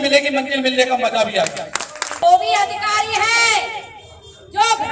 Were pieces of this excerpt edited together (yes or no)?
yes